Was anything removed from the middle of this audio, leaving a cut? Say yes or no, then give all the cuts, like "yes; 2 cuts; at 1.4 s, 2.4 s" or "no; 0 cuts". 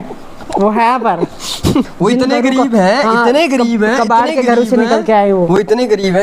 yes; 1 cut; at 1.9 s